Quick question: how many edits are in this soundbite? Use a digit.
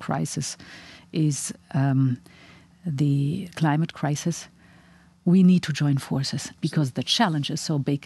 1